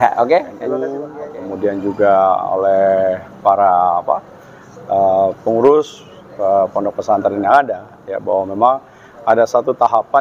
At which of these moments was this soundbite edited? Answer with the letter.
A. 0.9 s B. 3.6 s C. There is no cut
A